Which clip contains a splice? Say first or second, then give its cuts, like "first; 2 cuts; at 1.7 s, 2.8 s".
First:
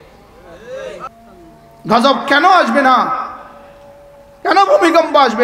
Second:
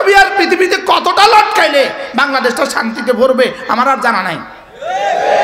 first; 1 cut; at 1.1 s